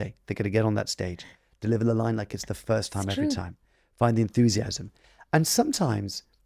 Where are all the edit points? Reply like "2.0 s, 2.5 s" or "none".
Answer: none